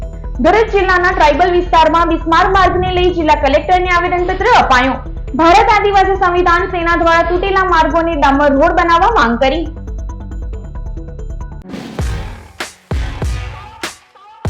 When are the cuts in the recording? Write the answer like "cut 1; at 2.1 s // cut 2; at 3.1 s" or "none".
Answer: cut 1; at 11.5 s